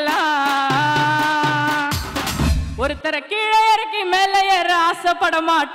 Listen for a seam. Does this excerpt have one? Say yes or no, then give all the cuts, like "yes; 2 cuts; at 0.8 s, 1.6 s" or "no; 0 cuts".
yes; 1 cut; at 2.5 s